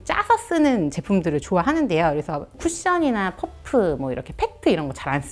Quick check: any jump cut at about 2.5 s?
yes; 1 cut; at 2.5 s

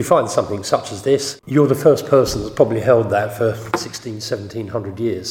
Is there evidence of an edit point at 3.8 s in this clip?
no; 1 cut; at 1.4 s

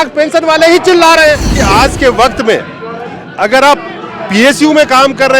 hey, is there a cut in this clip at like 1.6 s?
yes; 1 cut; at 1.6 s

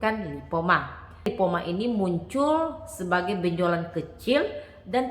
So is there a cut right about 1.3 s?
yes; 1 cut; at 1.3 s

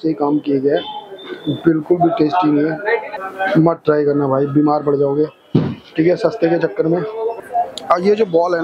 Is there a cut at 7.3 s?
yes; 2 cuts; at 3.1 s, 7.3 s

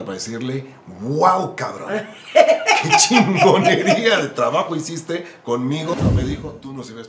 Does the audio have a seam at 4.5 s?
no; 1 cut; at 5.9 s

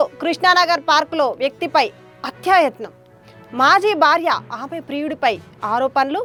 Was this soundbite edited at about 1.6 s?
no; 0 cuts

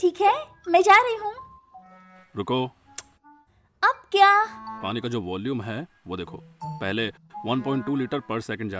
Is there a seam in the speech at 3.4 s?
no; 1 cut; at 4.6 s

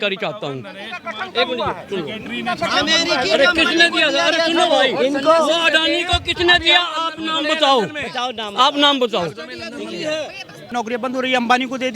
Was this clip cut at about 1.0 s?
no; 1 cut; at 10.7 s

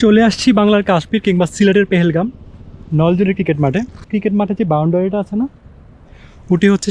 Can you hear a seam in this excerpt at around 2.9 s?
no; 1 cut; at 4.1 s

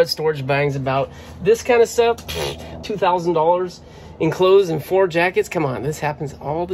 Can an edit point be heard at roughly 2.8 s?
yes; 1 cut; at 2.8 s

